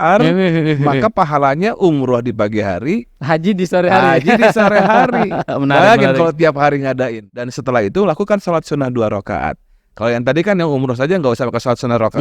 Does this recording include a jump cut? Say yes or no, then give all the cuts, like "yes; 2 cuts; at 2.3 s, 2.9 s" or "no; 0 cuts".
yes; 1 cut; at 7.3 s